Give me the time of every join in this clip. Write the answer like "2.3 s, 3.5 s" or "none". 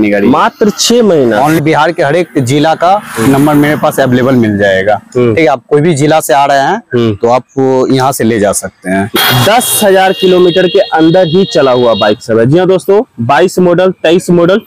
1.6 s, 9.1 s

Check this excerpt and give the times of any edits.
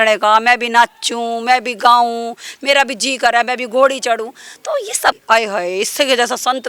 5.2 s

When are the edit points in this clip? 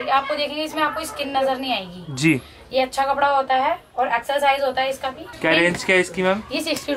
5.2 s

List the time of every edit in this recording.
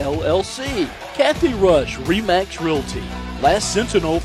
1.0 s

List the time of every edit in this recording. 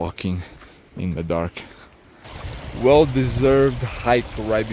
2.3 s

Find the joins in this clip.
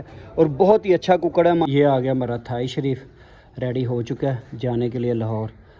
1.7 s

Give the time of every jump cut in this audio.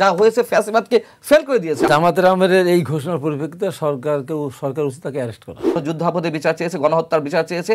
1.8 s, 5.8 s

